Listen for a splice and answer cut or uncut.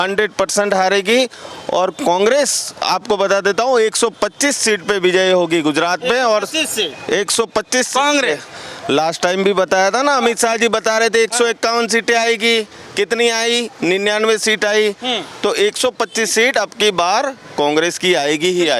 uncut